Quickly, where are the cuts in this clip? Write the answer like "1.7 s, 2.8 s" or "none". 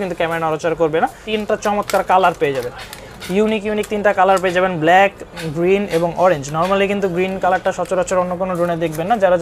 1.2 s